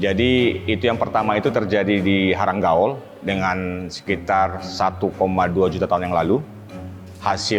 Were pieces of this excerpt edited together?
yes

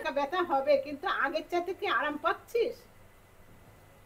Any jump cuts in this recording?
no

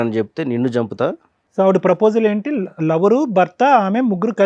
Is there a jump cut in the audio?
no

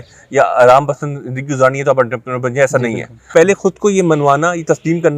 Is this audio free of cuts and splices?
no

